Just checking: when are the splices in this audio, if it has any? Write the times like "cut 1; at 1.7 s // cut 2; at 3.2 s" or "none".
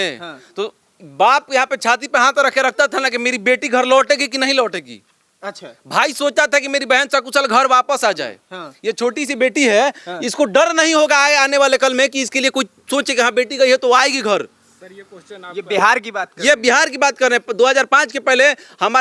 none